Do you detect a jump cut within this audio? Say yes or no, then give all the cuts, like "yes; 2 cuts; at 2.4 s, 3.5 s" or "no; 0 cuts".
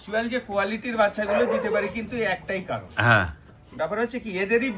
no; 0 cuts